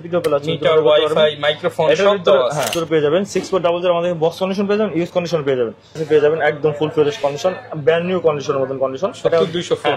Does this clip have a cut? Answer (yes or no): yes